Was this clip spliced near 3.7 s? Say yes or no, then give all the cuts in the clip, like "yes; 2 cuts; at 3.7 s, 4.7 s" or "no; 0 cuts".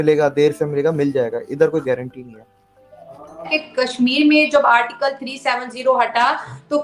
yes; 1 cut; at 3.7 s